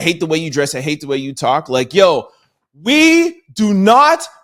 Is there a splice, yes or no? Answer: no